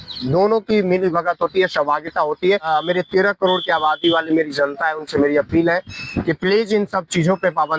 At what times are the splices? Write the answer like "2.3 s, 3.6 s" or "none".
2.6 s